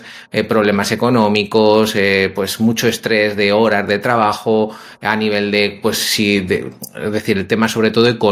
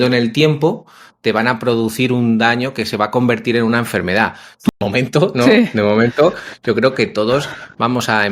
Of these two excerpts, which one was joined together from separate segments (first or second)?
second